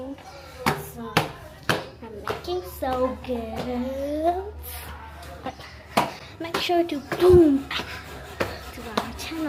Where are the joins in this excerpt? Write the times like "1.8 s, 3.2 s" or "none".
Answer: none